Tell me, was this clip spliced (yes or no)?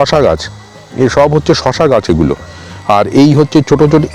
no